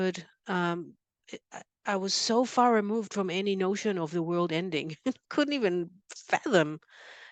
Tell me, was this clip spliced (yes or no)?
no